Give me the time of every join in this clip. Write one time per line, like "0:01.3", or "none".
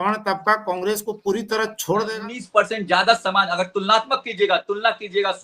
0:02.1